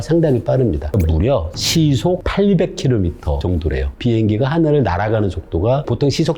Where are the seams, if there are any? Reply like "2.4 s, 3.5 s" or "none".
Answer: 1.0 s, 2.3 s, 3.5 s